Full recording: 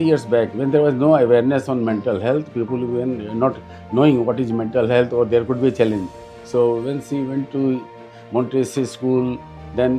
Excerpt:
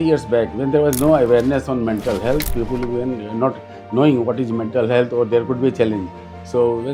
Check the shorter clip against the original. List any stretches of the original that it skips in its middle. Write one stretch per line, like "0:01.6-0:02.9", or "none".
none